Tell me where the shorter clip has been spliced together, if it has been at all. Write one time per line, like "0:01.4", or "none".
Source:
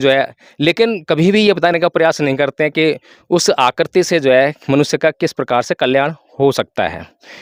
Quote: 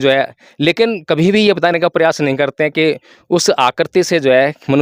none

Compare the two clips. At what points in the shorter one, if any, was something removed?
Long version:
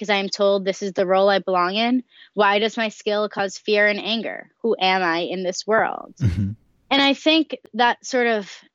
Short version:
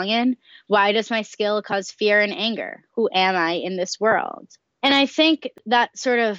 0:04.5

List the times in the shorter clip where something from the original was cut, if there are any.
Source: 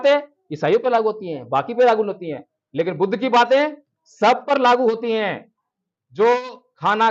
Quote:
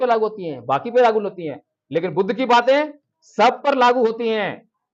none

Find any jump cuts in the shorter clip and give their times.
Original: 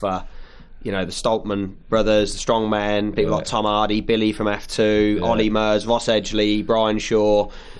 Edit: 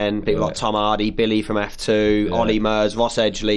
none

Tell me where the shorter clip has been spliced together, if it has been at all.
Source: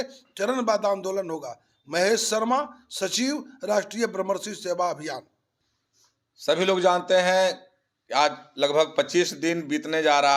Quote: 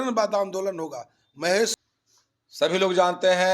0:01.7

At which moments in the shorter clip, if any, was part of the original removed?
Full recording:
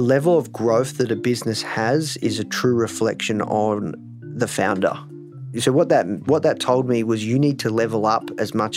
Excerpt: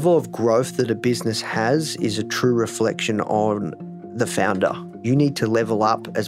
0:05.0

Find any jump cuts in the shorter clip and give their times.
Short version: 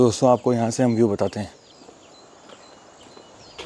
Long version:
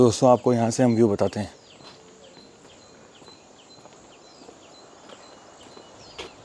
0:01.7

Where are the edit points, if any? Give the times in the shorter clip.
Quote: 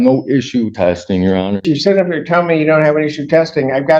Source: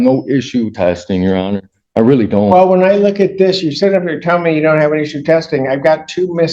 0:01.7

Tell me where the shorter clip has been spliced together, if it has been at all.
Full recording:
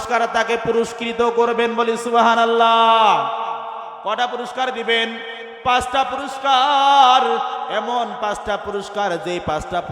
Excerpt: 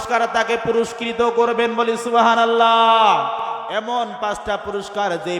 0:03.7

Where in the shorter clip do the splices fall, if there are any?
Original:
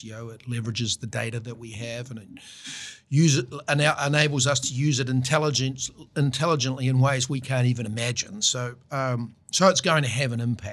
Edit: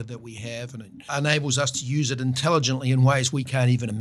0:01.1
0:02.4

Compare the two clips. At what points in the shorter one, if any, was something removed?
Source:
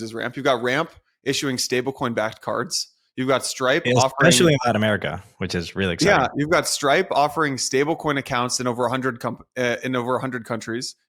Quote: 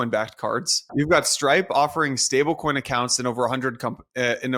0:00.9

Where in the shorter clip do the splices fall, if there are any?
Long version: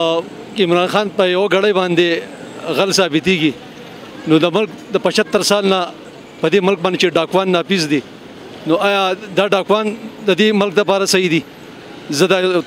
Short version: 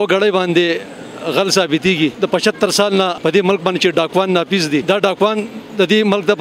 0:02.1
0:03.1
0:04.8

